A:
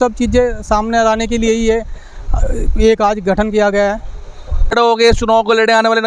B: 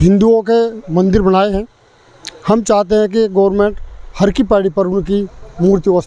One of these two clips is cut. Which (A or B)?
A